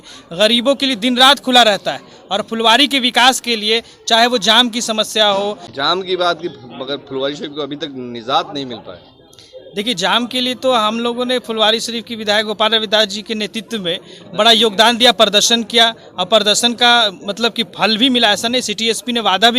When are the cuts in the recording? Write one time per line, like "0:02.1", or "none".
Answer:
0:05.7

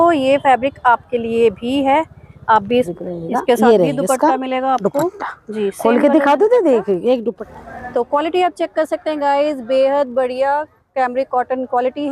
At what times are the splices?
0:02.9
0:07.4

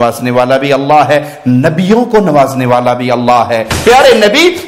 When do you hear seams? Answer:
0:03.7

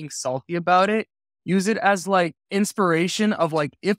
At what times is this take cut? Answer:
0:02.4

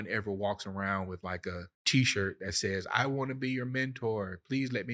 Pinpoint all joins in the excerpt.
0:01.7

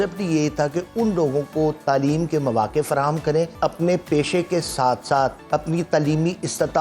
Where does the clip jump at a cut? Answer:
0:03.5
0:05.4

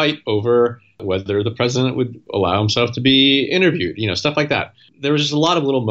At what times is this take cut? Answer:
0:01.0
0:02.2
0:04.8

